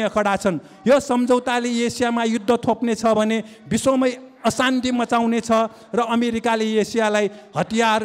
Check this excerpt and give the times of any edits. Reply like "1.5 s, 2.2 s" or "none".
none